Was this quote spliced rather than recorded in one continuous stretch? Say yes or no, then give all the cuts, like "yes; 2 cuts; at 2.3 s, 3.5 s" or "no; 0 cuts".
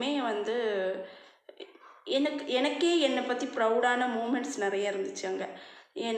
no; 0 cuts